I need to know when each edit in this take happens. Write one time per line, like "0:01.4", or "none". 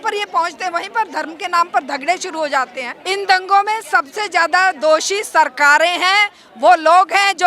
0:02.9